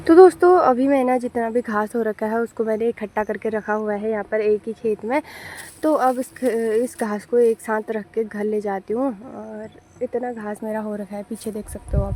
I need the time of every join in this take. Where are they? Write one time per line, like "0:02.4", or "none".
none